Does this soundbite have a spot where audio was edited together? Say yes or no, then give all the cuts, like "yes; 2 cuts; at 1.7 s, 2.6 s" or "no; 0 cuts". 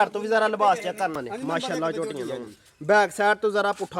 yes; 1 cut; at 1.2 s